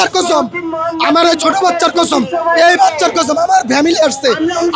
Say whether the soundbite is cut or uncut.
uncut